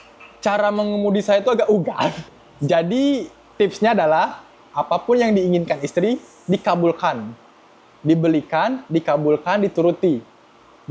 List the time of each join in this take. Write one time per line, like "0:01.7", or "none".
0:02.2